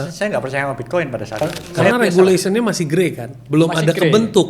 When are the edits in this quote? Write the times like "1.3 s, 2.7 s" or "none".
1.7 s